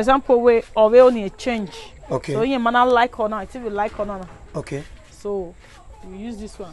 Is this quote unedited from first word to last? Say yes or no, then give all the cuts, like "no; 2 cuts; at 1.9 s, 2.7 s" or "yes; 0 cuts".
yes; 0 cuts